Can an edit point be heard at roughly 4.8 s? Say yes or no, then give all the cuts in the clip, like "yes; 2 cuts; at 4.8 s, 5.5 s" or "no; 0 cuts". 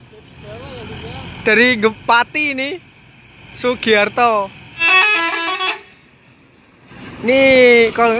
yes; 1 cut; at 4.8 s